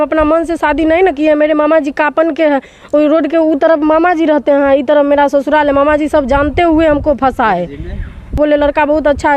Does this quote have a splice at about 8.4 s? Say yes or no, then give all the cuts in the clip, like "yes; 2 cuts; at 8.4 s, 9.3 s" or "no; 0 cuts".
yes; 1 cut; at 8.4 s